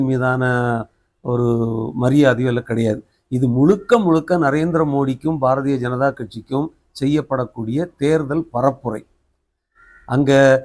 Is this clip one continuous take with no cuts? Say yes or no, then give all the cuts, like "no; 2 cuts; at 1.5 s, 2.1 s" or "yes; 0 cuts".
yes; 0 cuts